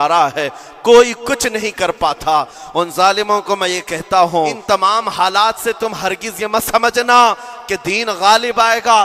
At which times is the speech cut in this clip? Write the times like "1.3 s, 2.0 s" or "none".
4.6 s